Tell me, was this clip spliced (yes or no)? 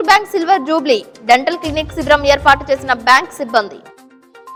no